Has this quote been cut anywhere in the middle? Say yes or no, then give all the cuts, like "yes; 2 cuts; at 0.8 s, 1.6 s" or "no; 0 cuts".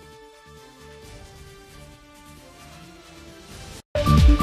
yes; 1 cut; at 3.2 s